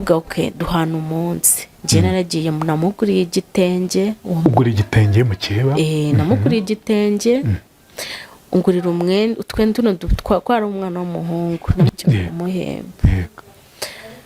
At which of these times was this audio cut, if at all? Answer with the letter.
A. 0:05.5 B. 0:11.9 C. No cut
B